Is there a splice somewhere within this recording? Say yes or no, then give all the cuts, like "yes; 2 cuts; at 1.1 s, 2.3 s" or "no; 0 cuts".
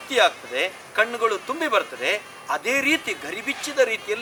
no; 0 cuts